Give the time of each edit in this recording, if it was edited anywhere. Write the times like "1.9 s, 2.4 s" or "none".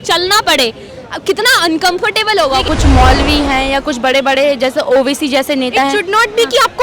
2.6 s